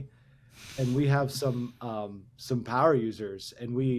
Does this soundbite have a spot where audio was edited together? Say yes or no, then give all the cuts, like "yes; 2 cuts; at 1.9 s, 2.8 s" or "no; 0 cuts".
no; 0 cuts